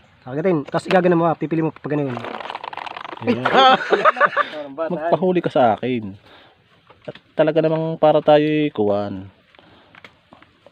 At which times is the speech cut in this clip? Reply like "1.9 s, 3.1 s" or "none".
4.4 s